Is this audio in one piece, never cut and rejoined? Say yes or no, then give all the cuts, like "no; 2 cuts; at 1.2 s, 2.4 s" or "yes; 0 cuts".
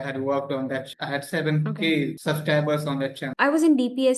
no; 3 cuts; at 0.9 s, 2.2 s, 3.3 s